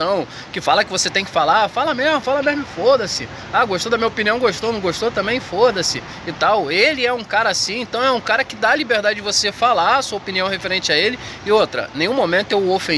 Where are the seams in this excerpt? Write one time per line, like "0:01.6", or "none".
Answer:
none